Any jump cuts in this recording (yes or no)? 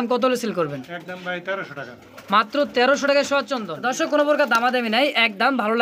yes